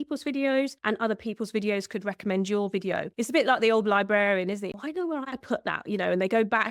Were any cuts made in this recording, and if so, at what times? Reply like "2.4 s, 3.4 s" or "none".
3.1 s, 4.7 s